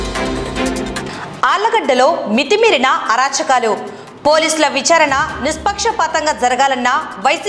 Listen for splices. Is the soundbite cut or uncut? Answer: uncut